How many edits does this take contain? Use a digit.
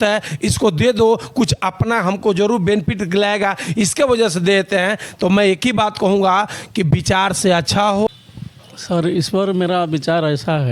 1